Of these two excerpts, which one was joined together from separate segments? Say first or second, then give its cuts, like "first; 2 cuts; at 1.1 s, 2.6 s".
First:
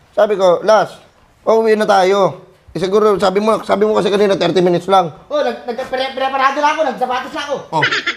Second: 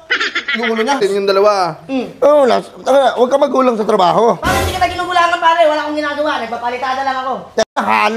second; 1 cut; at 1.0 s